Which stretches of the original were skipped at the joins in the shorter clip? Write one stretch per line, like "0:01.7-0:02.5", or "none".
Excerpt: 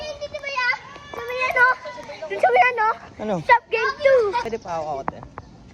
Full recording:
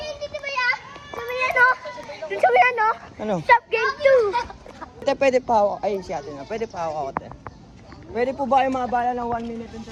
0:04.6-0:06.6